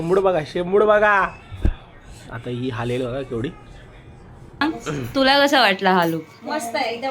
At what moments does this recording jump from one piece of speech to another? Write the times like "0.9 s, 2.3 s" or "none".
4.6 s